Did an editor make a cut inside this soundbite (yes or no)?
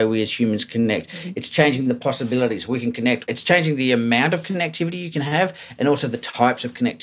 yes